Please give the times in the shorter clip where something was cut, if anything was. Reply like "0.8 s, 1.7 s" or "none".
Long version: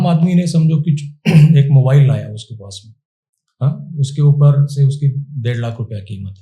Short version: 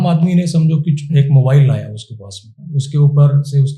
1.1 s, 2.6 s

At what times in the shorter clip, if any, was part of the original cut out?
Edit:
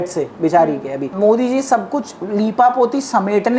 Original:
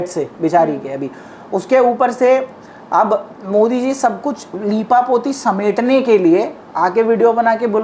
1.0 s

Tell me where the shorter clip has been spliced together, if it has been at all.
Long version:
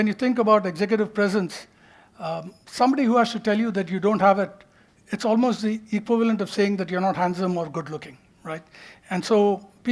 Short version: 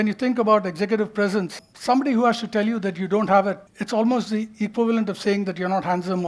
1.7 s, 3.7 s

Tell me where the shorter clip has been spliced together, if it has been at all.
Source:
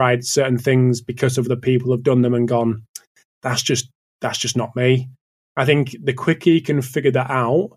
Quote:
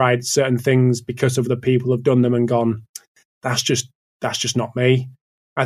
none

